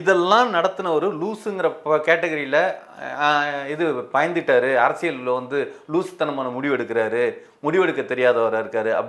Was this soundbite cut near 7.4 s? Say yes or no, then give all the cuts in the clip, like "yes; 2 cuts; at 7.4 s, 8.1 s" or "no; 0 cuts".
no; 0 cuts